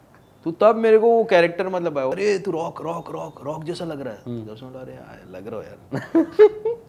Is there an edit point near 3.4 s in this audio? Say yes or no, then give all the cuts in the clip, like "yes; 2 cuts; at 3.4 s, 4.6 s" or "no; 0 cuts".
no; 1 cut; at 2.1 s